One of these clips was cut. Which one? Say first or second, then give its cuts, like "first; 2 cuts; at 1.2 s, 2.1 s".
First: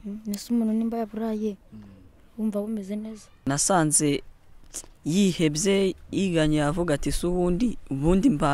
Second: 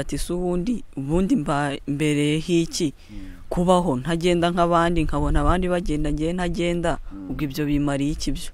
first; 1 cut; at 3.5 s